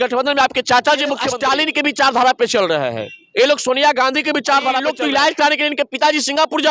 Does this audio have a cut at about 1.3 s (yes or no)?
yes